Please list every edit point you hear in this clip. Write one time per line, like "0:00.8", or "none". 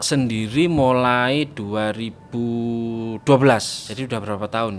0:03.8